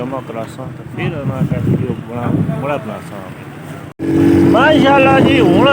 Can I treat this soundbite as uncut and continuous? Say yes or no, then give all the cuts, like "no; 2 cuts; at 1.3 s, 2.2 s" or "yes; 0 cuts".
yes; 0 cuts